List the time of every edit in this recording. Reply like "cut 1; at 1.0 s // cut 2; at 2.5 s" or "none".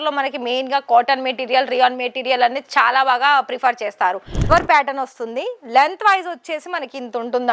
cut 1; at 4.5 s